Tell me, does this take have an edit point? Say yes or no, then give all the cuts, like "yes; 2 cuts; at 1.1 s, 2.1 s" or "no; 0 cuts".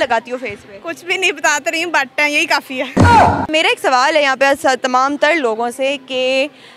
no; 0 cuts